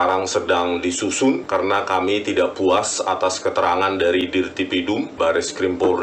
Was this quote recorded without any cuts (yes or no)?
no